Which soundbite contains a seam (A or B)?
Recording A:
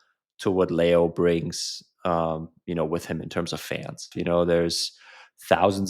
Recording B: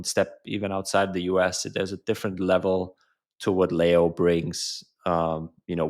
A